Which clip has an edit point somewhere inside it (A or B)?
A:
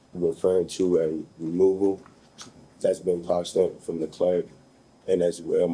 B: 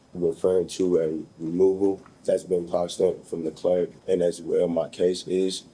B